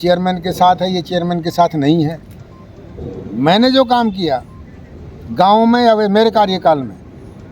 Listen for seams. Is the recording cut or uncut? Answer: uncut